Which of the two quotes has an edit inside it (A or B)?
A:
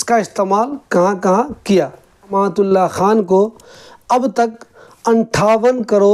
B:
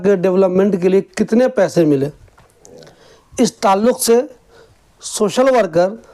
A